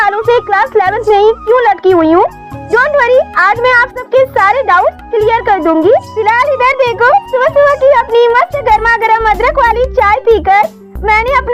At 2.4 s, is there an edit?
no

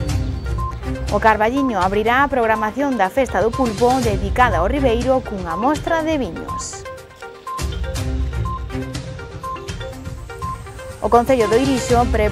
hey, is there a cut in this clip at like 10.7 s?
no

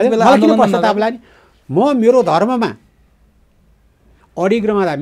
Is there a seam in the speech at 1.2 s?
no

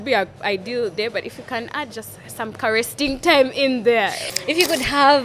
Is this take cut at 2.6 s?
no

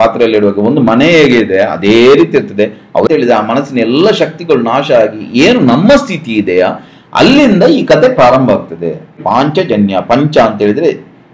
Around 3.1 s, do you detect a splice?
yes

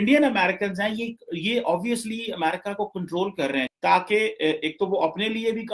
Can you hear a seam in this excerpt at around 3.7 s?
yes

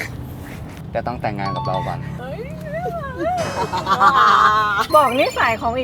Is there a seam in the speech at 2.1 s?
yes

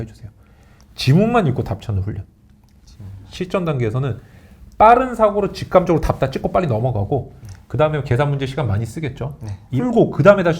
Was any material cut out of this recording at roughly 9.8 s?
yes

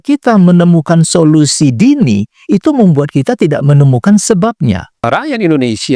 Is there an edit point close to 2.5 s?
no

